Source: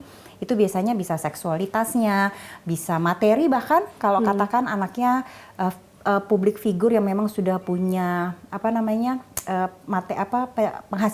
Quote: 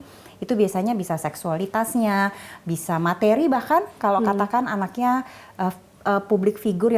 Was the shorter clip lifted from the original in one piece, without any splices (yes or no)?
yes